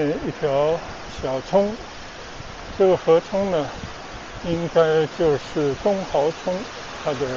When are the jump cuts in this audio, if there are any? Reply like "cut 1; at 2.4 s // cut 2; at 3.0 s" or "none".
none